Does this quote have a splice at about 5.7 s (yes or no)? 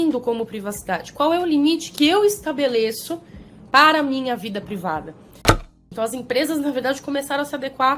yes